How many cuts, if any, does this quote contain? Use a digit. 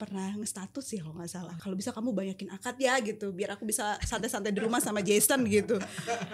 1